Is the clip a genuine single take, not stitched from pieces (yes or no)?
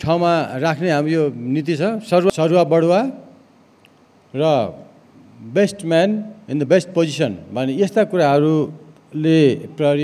no